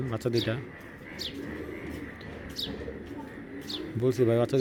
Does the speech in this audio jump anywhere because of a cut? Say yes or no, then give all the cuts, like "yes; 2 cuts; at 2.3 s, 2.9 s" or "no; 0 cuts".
no; 0 cuts